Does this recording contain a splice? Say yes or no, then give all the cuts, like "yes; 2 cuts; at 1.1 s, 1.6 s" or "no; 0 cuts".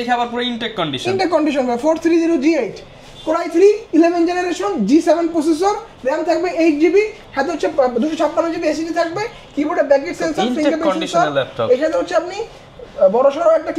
no; 0 cuts